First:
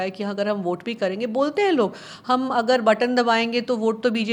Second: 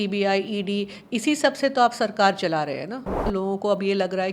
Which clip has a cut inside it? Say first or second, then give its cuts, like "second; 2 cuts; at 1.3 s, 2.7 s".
second; 1 cut; at 3.2 s